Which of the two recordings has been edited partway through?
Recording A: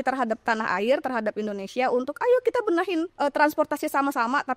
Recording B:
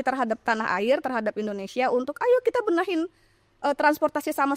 A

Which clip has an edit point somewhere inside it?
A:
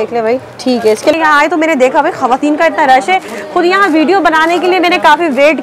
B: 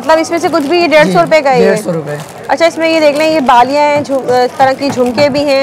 A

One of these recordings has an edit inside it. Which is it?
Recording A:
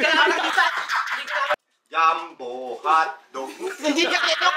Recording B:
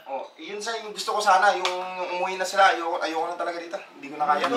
A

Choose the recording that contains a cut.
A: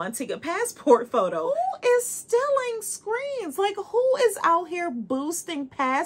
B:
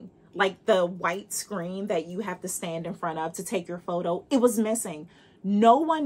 A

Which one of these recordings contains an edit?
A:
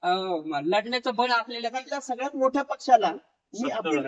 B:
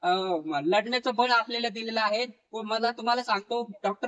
A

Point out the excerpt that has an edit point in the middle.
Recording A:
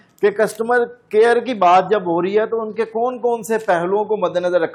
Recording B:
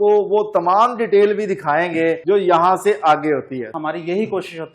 B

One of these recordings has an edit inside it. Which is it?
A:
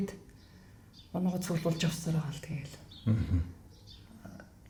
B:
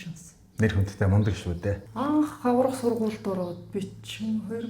B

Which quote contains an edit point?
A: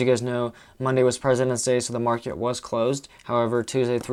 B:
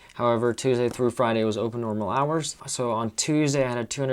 B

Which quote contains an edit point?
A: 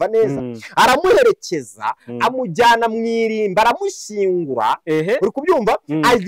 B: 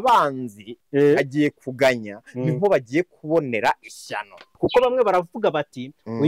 B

